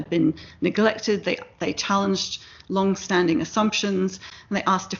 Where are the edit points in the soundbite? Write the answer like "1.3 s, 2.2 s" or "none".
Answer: none